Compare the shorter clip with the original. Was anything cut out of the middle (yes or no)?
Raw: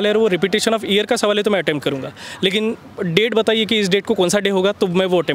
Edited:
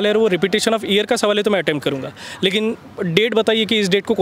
no